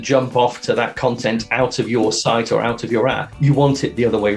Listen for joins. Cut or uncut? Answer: cut